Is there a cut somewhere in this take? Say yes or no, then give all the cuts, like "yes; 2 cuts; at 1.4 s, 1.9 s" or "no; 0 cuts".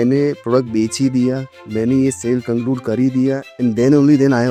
no; 0 cuts